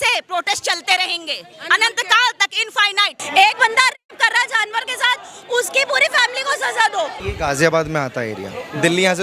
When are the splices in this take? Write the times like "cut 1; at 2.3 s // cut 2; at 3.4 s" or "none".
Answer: cut 1; at 3.1 s // cut 2; at 7.2 s